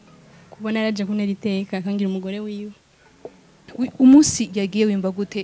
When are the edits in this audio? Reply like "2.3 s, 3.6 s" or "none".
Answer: 3.6 s